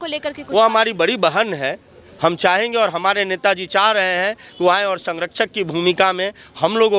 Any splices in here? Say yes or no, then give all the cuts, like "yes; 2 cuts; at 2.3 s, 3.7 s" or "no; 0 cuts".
no; 0 cuts